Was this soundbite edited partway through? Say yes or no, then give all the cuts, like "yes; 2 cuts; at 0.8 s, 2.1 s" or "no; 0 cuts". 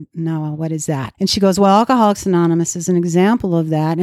yes; 1 cut; at 1.1 s